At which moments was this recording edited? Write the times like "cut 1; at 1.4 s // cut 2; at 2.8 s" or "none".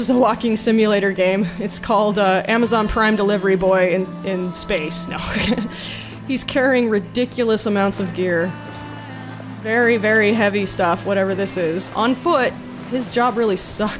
none